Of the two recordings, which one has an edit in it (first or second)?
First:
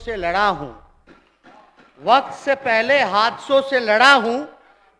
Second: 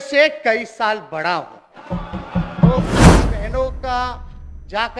second